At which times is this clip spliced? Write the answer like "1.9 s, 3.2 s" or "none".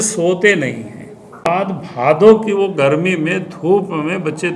1.5 s